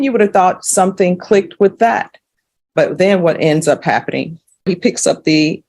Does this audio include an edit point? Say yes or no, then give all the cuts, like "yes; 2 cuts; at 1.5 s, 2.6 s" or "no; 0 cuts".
yes; 1 cut; at 4.7 s